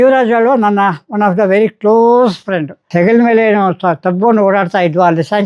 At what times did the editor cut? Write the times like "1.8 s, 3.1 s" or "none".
2.8 s